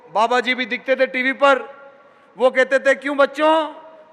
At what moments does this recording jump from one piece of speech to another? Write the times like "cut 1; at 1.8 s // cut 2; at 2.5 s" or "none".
none